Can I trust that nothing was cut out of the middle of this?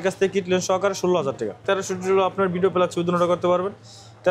no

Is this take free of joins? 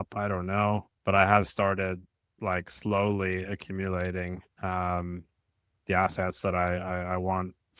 no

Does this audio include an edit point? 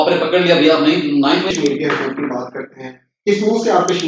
yes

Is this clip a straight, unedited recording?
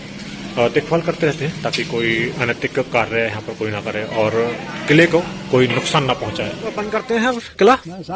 no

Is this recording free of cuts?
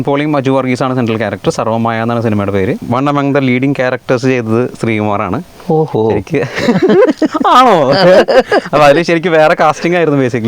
no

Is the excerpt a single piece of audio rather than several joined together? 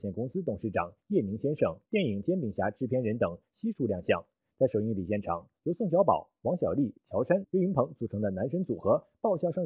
yes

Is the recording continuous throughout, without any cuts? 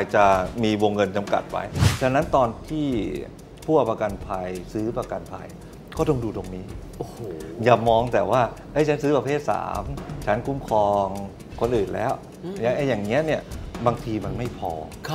no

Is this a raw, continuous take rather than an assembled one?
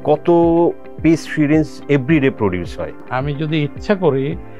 no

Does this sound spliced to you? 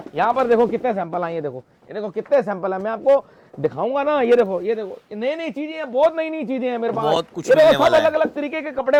no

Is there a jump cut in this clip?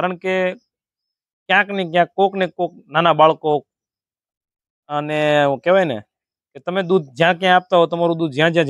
no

